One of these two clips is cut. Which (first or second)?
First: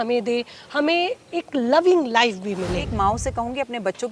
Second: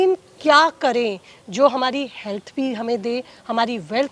first